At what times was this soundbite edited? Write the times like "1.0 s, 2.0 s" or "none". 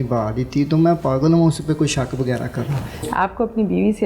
3.1 s